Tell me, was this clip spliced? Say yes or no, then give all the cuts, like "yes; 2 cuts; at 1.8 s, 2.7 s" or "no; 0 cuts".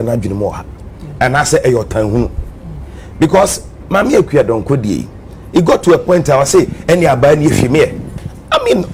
no; 0 cuts